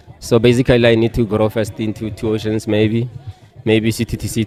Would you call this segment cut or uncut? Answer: uncut